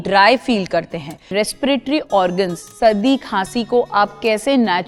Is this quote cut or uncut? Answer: cut